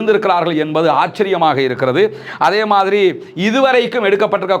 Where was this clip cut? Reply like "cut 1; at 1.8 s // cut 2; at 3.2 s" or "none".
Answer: none